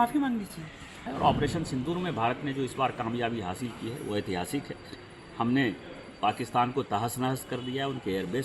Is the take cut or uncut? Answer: cut